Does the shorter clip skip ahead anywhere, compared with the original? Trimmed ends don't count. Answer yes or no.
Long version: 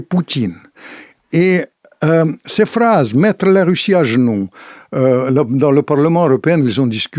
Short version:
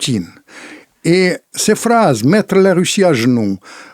yes